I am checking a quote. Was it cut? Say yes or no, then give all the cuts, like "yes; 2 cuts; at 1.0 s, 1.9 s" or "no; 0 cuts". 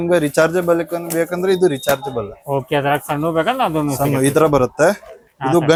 no; 0 cuts